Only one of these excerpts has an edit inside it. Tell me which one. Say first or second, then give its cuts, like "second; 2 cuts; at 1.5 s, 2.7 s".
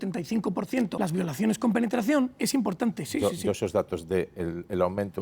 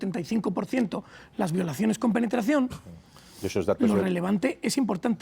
first; 2 cuts; at 0.9 s, 2.4 s